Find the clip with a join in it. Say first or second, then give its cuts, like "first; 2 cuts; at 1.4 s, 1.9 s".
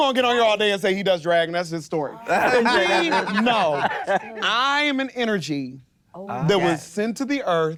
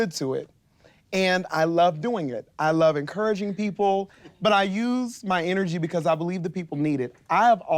second; 1 cut; at 4.2 s